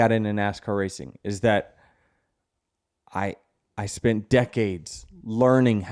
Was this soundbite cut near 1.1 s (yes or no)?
no